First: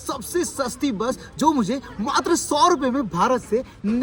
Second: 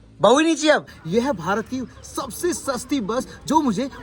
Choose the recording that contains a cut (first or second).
second